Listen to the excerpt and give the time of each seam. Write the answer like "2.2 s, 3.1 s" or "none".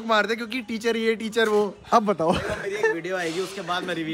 none